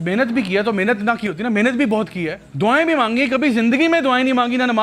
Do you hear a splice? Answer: yes; 1 cut; at 2.4 s

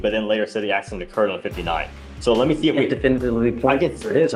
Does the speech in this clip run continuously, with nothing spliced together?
yes; 0 cuts

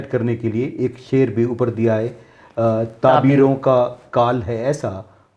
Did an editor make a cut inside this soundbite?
no; 0 cuts

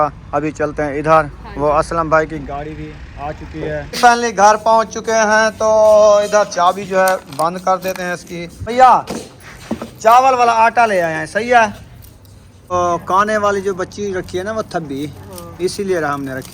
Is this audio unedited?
no; 3 cuts; at 4.0 s, 8.6 s, 12.6 s

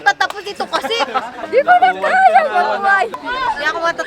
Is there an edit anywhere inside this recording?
yes; 2 cuts; at 1.4 s, 3.2 s

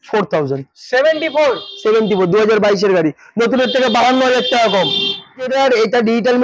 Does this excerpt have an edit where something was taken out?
yes; 1 cut; at 5.5 s

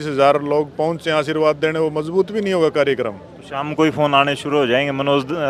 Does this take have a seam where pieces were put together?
no; 0 cuts

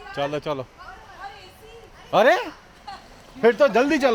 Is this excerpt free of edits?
yes; 0 cuts

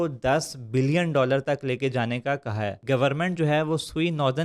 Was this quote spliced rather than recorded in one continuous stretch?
yes; 1 cut; at 2.8 s

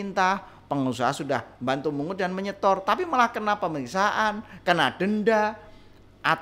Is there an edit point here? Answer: no; 0 cuts

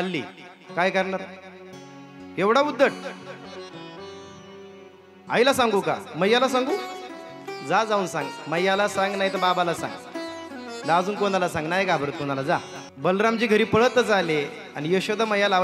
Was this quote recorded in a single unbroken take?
yes; 0 cuts

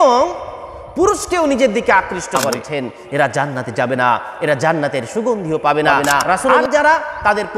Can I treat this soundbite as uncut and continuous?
no; 2 cuts; at 2.5 s, 6.6 s

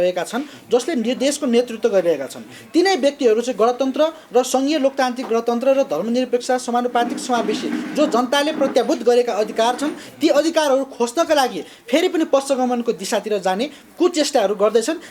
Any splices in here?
no; 0 cuts

